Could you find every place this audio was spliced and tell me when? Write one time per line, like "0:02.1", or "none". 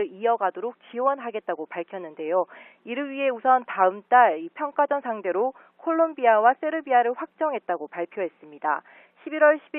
0:02.8